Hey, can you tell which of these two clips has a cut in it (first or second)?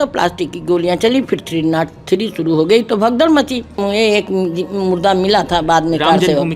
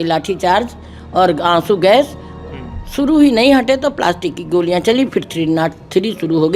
first